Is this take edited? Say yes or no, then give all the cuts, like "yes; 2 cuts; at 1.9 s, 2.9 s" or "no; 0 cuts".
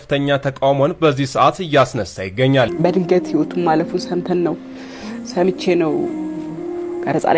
yes; 1 cut; at 2.7 s